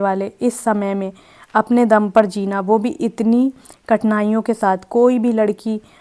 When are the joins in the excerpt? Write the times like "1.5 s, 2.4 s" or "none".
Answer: none